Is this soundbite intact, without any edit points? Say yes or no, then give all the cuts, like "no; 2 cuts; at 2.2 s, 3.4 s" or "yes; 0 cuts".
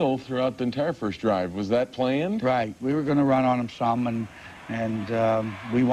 no; 1 cut; at 2.8 s